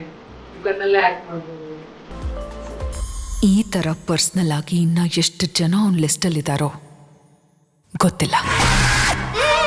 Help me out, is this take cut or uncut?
uncut